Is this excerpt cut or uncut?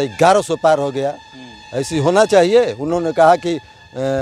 uncut